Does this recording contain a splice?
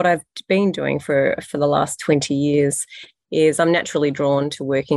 no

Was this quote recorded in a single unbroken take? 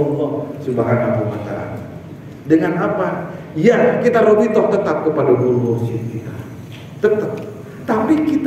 yes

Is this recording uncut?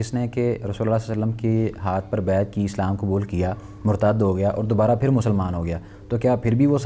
yes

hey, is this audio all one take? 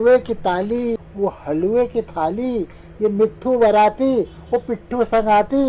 no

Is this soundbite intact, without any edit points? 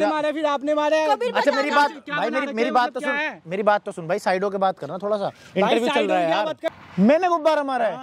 no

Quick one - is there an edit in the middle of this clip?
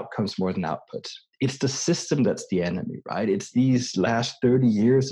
no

